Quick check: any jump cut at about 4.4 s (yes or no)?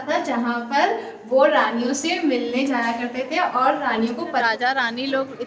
yes